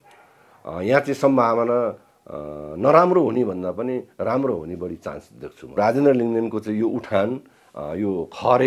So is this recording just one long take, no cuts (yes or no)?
no